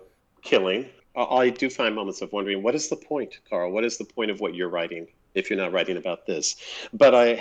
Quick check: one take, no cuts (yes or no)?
no